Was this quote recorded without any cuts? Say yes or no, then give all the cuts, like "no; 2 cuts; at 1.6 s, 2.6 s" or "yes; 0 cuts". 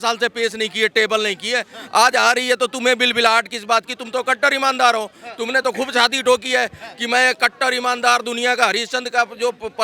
yes; 0 cuts